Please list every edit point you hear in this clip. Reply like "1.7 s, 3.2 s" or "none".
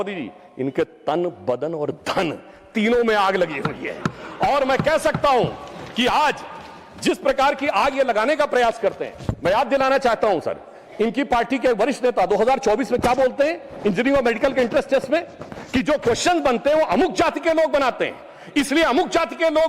none